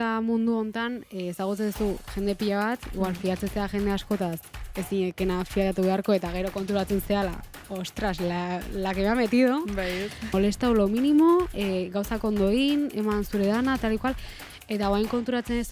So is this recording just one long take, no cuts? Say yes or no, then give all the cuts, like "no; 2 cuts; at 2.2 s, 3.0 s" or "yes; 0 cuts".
no; 1 cut; at 10.3 s